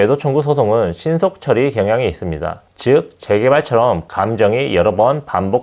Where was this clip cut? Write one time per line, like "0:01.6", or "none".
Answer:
none

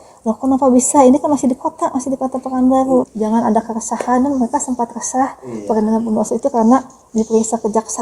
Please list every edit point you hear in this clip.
0:03.1

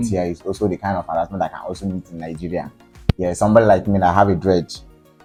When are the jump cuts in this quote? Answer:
none

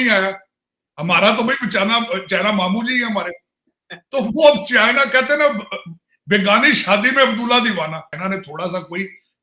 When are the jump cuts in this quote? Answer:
0:08.2

